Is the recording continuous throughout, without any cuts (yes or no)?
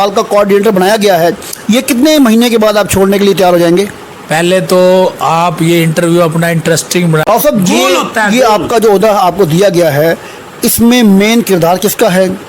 no